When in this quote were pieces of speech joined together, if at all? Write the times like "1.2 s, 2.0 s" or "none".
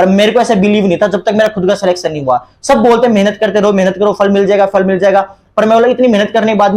none